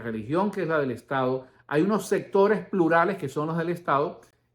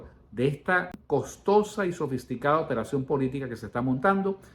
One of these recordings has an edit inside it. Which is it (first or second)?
second